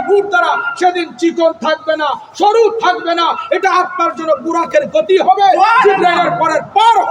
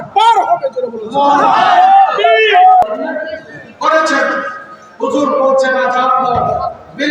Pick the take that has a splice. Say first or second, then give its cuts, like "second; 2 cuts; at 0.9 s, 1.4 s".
second; 1 cut; at 2.8 s